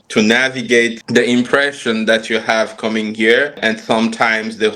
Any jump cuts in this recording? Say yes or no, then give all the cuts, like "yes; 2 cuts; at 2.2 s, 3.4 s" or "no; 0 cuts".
yes; 1 cut; at 3.6 s